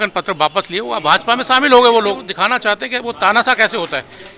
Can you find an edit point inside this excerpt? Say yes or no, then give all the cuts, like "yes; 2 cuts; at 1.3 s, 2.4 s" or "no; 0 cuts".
yes; 1 cut; at 2.3 s